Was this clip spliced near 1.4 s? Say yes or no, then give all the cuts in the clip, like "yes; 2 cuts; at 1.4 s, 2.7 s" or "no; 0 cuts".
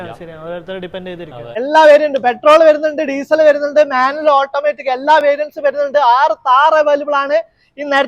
yes; 1 cut; at 1.4 s